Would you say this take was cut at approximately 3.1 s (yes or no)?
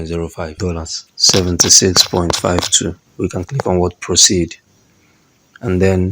no